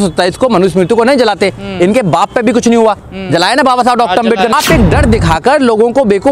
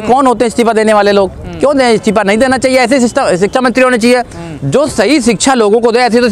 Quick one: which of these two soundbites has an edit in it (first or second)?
first